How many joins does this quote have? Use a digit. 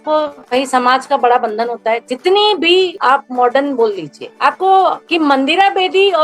1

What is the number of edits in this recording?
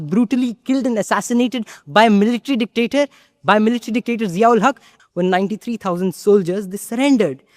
1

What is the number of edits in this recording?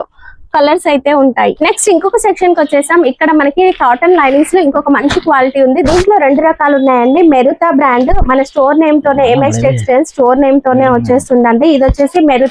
1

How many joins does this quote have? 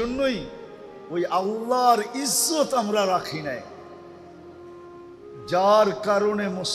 2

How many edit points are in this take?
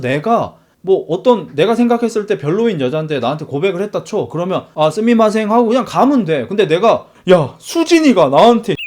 1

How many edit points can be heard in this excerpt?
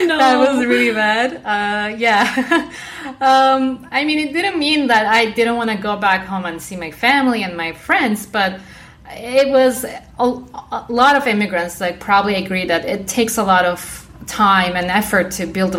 1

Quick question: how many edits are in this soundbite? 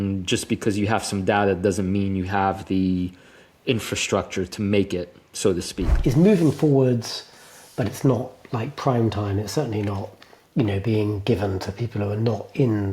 1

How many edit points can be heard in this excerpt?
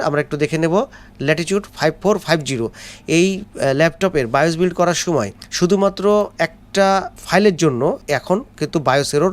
3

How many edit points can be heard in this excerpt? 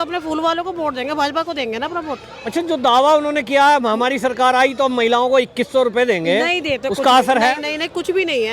0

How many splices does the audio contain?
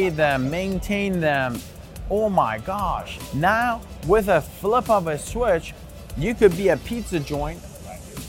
1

